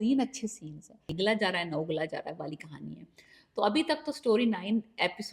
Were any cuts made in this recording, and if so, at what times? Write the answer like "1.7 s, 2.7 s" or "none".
1.1 s

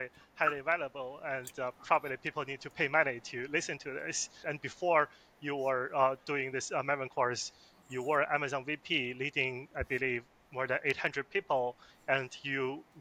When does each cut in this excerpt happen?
none

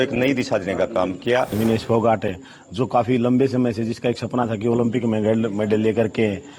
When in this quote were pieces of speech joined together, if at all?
1.5 s

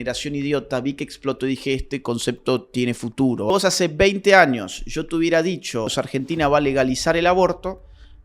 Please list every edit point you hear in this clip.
3.5 s, 6.0 s

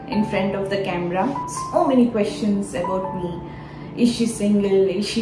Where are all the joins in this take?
1.4 s

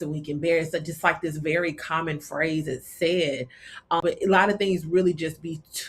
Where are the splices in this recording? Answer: 4.0 s

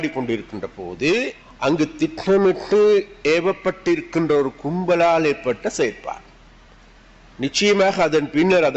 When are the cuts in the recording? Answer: 1.4 s

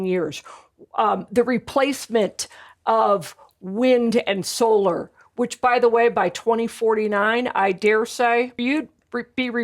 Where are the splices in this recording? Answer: 8.5 s

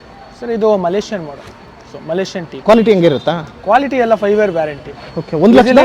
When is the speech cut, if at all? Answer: none

